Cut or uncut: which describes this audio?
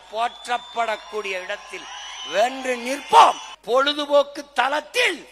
cut